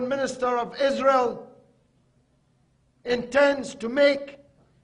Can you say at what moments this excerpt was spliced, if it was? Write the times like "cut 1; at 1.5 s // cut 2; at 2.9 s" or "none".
none